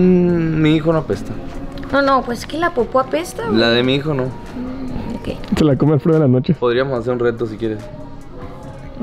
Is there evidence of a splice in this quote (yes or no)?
no